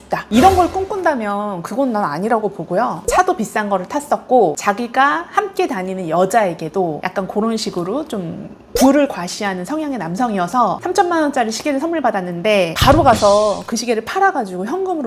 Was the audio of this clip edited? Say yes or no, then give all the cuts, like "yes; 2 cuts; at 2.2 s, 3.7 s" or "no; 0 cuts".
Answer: yes; 2 cuts; at 3.0 s, 12.8 s